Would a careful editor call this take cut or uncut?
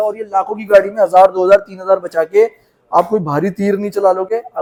uncut